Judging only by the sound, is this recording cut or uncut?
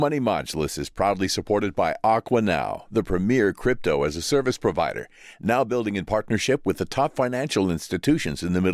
uncut